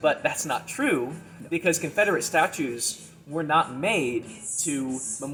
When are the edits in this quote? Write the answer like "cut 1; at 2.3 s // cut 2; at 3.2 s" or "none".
none